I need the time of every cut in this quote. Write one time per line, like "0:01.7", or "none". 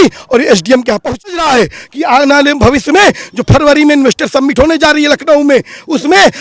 0:01.0